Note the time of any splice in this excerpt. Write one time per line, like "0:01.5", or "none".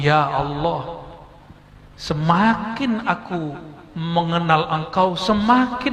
none